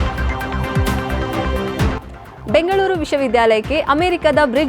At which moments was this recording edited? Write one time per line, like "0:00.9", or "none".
0:02.1